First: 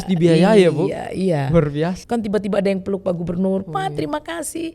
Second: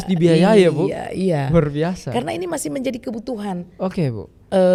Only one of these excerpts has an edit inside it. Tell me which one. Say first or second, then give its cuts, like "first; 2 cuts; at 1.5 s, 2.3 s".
first; 1 cut; at 2.0 s